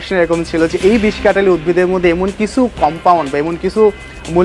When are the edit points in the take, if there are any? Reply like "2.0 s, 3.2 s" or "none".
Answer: none